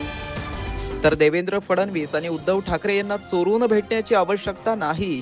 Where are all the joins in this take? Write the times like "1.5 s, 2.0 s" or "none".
1.0 s